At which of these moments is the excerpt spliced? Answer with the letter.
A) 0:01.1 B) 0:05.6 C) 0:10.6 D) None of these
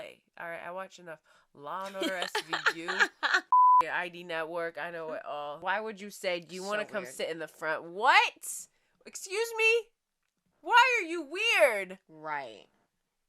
B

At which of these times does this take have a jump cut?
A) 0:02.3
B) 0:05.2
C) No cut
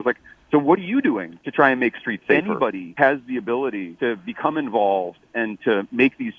A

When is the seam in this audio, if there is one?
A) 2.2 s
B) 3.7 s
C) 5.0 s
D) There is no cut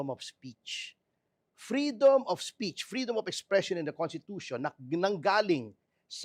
D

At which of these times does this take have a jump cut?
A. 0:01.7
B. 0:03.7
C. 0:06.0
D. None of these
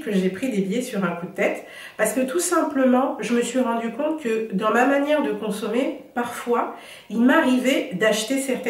D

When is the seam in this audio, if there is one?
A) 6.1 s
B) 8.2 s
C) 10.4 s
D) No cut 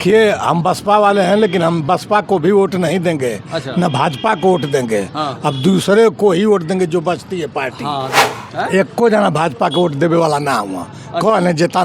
B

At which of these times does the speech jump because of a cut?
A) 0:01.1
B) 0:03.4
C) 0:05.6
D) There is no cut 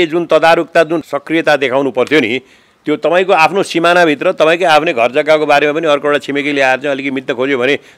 A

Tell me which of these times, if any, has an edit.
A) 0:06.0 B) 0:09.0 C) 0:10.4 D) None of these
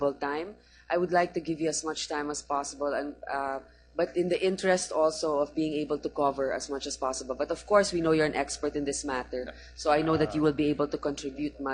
B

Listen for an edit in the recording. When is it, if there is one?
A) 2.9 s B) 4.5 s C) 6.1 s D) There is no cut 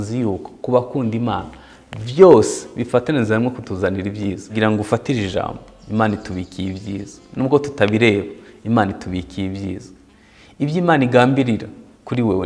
B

